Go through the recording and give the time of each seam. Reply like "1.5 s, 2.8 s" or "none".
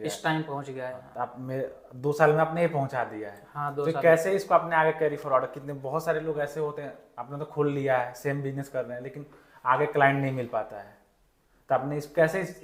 none